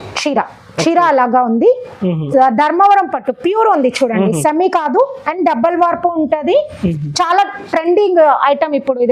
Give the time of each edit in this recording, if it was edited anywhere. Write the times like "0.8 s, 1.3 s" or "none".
none